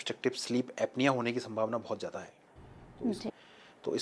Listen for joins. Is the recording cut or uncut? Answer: uncut